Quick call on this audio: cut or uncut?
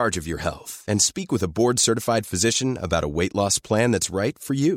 uncut